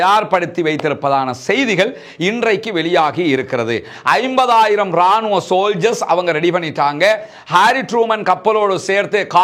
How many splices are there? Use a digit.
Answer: 0